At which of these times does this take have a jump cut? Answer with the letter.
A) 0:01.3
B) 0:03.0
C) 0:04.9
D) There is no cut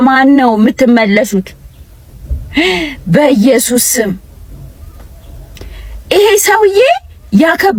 D